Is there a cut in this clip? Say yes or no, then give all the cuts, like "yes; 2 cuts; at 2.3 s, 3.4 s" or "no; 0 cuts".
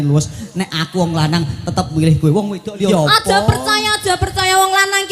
yes; 1 cut; at 2.9 s